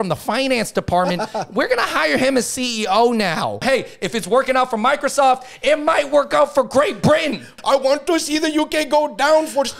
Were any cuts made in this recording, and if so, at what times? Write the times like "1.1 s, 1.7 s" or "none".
3.6 s, 7.5 s